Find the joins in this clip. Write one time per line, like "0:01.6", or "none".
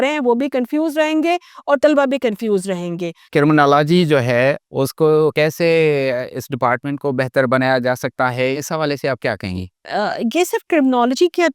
0:03.2
0:04.7
0:05.3
0:08.5
0:09.8